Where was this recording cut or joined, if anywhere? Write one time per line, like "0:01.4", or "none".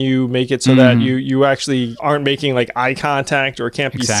0:01.9